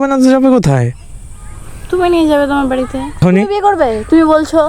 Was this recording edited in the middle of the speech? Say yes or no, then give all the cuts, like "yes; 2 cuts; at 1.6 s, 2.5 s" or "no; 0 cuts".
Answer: yes; 1 cut; at 3.2 s